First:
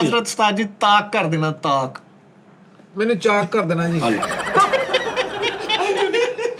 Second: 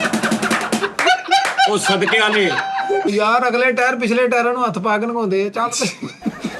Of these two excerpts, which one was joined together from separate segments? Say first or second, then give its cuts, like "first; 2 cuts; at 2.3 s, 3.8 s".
second; 1 cut; at 3.1 s